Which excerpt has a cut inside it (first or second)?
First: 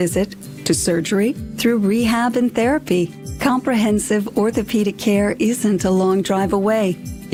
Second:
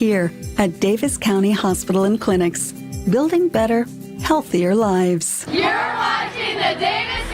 second